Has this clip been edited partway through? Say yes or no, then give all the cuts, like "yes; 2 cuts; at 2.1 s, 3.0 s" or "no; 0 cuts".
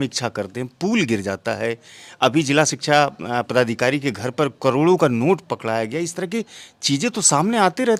no; 0 cuts